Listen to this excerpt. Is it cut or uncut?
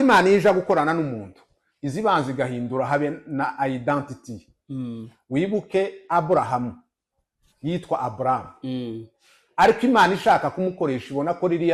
uncut